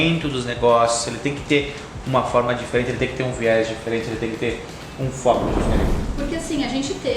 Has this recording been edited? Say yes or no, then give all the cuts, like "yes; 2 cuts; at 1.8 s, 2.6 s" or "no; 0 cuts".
yes; 1 cut; at 6.0 s